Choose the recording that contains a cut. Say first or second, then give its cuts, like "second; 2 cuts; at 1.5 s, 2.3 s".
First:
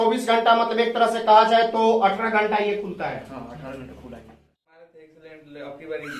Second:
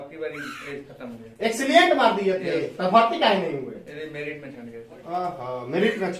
first; 1 cut; at 4.6 s